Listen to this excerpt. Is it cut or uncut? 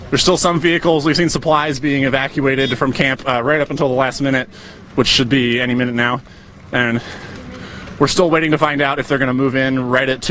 cut